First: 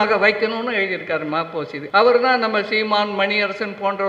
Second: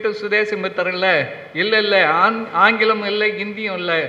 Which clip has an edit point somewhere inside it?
first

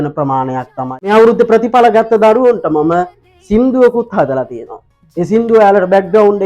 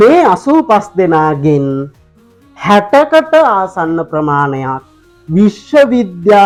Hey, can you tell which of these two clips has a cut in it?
first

